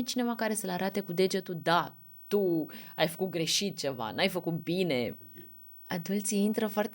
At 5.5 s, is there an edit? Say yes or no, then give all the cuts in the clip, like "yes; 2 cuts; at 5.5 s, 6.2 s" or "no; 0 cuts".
yes; 1 cut; at 5.5 s